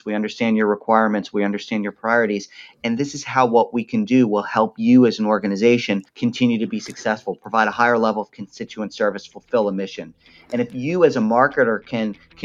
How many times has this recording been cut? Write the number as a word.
one